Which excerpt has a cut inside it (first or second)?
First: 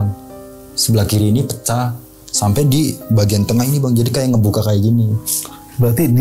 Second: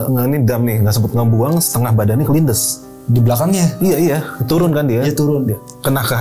first